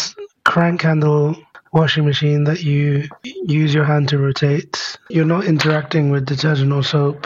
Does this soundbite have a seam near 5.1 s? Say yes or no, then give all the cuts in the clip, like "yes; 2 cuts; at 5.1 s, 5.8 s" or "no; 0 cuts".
yes; 1 cut; at 5.1 s